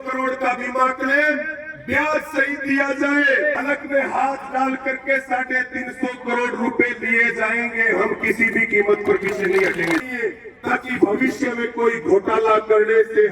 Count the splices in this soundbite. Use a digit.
2